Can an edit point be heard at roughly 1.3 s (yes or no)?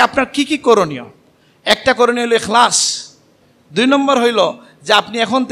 no